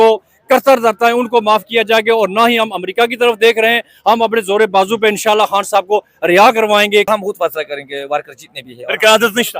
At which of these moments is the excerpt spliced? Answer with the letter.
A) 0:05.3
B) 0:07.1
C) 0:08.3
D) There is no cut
B